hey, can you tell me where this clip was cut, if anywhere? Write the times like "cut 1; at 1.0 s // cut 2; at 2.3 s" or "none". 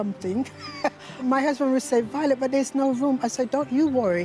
cut 1; at 1.2 s